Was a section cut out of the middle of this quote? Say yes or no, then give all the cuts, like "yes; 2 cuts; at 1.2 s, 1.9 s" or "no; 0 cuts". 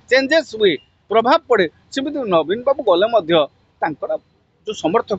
no; 0 cuts